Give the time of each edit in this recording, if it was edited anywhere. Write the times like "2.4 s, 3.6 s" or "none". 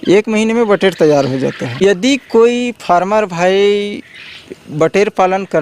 1.6 s